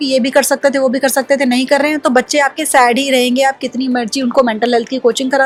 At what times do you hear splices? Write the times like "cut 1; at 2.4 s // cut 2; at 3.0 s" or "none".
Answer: none